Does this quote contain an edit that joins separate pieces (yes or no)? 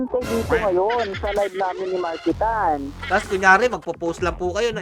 yes